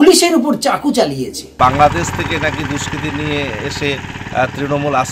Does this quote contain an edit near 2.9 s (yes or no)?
no